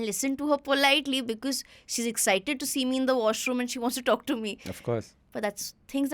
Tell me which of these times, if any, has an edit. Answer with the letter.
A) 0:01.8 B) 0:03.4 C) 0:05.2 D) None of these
C